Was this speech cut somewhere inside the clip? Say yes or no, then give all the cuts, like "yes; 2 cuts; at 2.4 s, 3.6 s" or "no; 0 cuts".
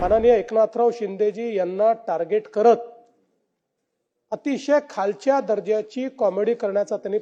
no; 0 cuts